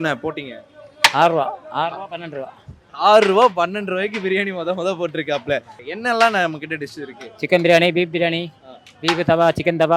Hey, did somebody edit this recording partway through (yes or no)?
yes